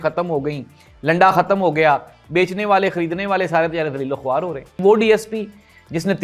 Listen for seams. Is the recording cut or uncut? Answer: cut